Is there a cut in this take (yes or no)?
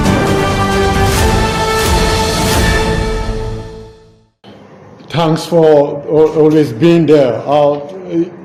no